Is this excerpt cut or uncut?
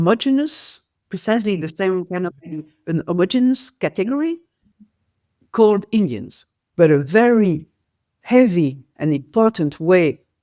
cut